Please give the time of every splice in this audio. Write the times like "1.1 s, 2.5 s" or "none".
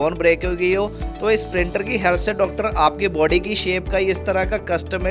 none